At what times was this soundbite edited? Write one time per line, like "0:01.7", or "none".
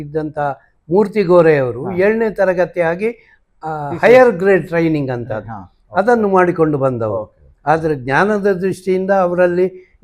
none

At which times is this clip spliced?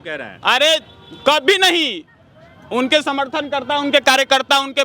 none

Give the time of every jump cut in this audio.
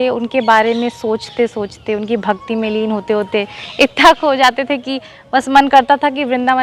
none

